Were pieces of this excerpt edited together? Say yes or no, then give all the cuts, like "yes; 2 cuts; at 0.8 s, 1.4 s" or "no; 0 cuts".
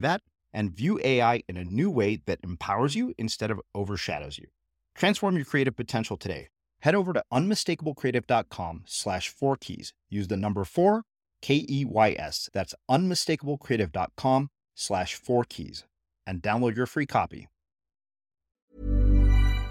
yes; 1 cut; at 18.7 s